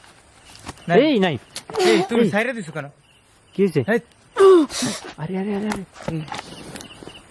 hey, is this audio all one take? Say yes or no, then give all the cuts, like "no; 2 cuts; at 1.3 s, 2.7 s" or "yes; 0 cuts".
yes; 0 cuts